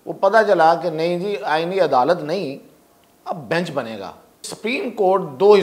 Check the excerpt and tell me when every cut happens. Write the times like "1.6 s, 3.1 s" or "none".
4.5 s